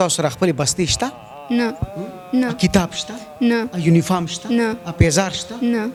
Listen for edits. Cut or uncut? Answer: uncut